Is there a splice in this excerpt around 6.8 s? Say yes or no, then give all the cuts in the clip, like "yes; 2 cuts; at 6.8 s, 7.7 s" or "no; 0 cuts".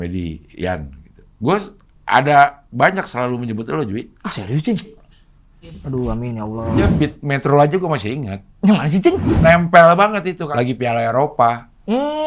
yes; 3 cuts; at 6.8 s, 9.3 s, 10.4 s